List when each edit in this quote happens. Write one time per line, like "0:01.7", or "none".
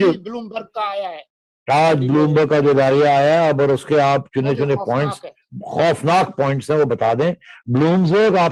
none